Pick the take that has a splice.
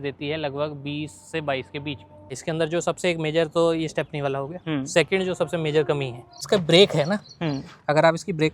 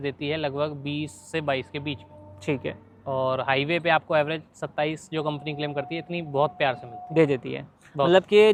first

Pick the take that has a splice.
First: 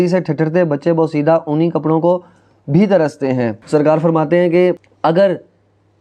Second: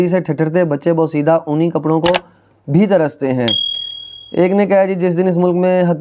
first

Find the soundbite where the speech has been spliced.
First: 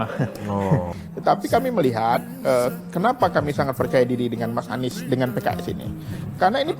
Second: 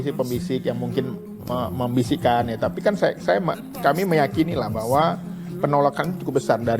first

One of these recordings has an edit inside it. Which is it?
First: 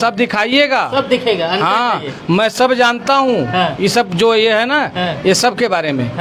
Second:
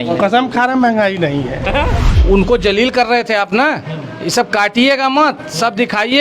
second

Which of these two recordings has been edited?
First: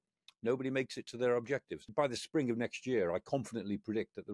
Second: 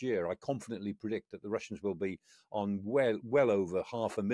first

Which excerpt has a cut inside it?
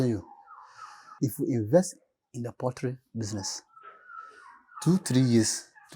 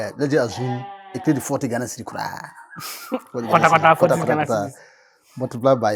first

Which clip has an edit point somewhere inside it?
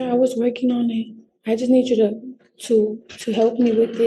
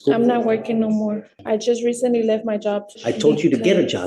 second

